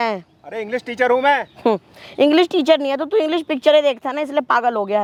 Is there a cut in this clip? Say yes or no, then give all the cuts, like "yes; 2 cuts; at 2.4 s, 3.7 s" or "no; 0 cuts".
no; 0 cuts